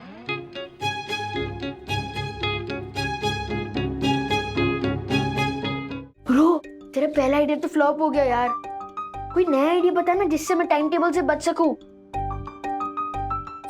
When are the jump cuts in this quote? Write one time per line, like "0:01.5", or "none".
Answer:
0:05.8

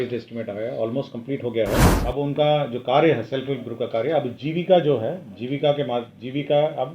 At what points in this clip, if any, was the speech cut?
0:01.9

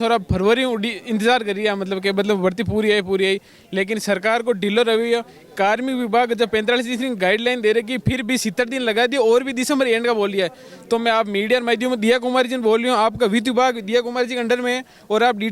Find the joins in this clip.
none

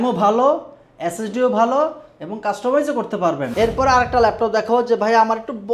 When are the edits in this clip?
0:03.5

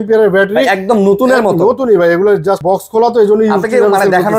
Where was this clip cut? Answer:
0:02.6

